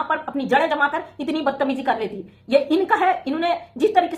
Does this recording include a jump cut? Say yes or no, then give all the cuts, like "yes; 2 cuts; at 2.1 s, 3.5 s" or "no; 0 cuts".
no; 0 cuts